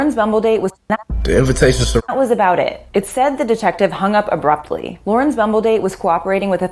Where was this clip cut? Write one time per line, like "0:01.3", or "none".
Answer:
0:00.8
0:02.0